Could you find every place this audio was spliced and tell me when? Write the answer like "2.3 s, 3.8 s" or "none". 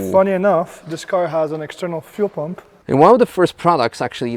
2.7 s